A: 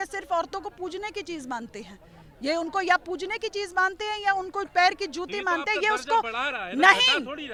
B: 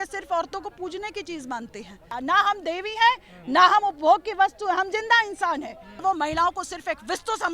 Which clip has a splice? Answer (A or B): B